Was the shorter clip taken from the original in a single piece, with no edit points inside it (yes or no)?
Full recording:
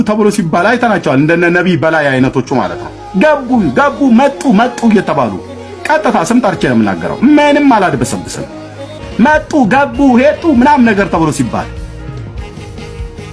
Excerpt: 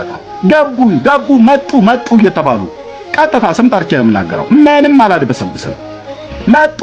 yes